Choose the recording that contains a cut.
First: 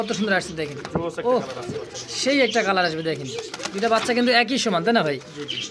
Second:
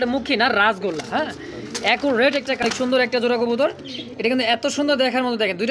second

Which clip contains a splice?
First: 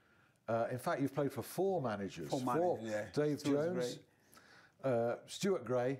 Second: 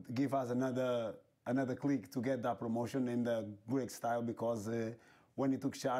second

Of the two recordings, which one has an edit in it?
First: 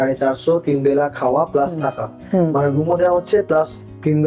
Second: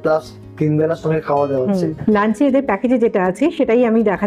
second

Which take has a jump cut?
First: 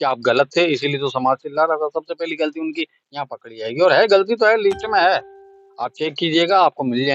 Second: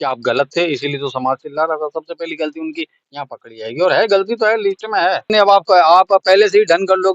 second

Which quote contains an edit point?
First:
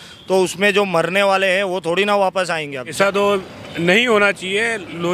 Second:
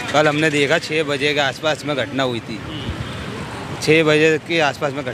first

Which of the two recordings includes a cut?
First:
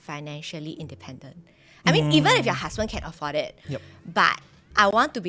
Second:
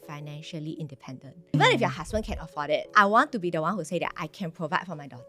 second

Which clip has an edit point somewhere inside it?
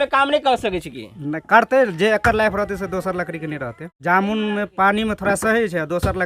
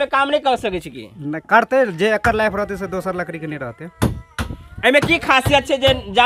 first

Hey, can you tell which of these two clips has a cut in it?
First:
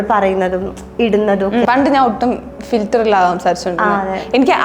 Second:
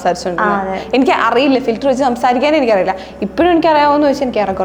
first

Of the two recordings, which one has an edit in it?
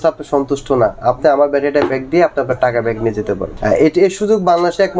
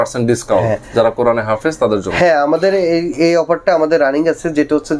first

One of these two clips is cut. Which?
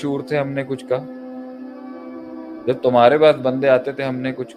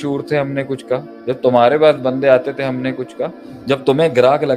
second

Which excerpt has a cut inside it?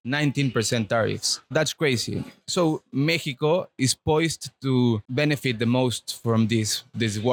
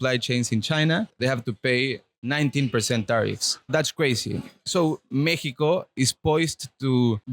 second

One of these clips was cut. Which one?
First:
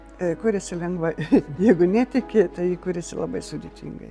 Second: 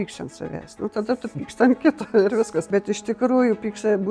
second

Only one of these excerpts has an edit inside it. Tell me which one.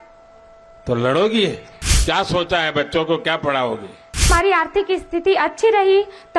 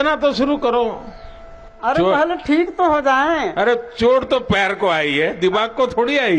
first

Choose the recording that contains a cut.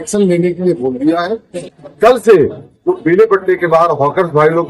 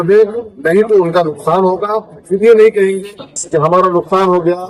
first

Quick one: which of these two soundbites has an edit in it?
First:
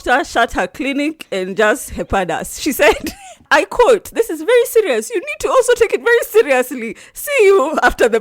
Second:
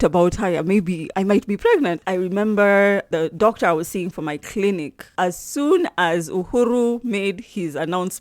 second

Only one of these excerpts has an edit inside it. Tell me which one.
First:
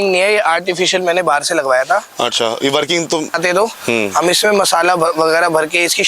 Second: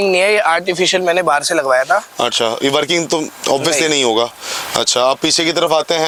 first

